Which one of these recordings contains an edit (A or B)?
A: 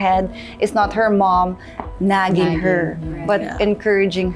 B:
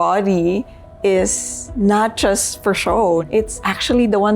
B